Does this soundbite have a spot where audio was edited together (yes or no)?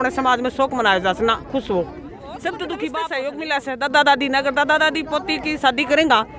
yes